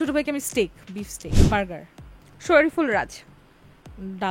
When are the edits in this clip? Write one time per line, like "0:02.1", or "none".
0:01.2